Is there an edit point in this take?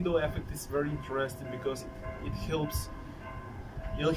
no; 0 cuts

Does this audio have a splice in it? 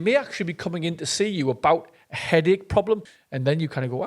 yes; 1 cut; at 3.1 s

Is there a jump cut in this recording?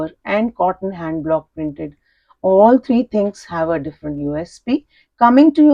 no; 0 cuts

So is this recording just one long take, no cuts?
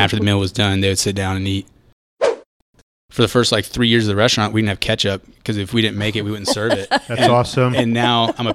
no; 1 cut; at 2.5 s

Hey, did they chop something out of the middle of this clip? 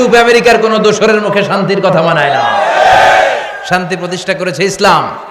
no; 0 cuts

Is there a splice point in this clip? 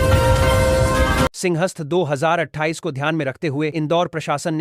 yes; 1 cut; at 1.3 s

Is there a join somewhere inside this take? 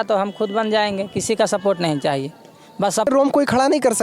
yes; 1 cut; at 3.1 s

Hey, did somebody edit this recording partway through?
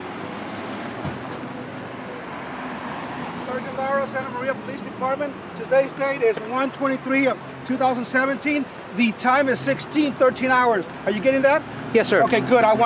no; 0 cuts

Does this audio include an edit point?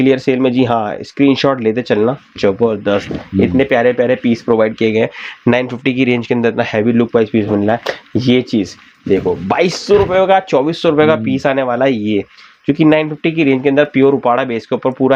no; 0 cuts

